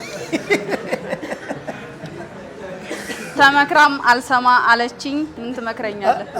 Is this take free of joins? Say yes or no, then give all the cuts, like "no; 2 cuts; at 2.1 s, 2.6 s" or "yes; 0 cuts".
no; 1 cut; at 5.4 s